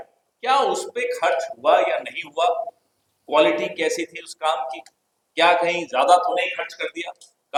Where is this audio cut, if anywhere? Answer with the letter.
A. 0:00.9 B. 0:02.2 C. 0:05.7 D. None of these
D